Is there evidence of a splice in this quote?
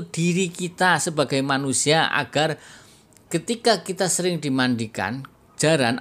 no; 0 cuts

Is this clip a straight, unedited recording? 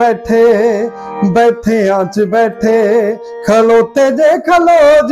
yes; 0 cuts

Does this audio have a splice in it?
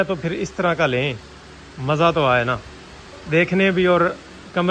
no; 0 cuts

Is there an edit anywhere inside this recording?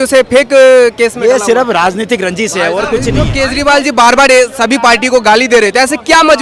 yes; 1 cut; at 3.2 s

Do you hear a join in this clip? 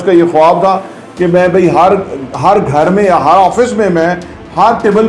no; 0 cuts

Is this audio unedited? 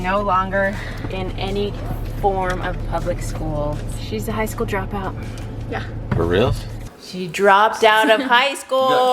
no; 2 cuts; at 4.0 s, 6.9 s

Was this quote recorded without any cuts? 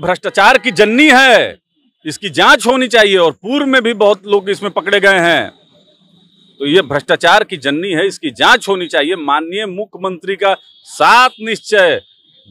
yes; 0 cuts

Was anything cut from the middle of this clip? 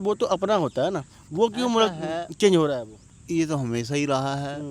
no; 0 cuts

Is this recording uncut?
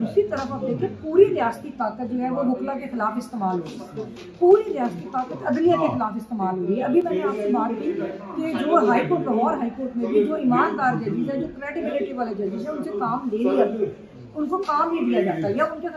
yes; 0 cuts

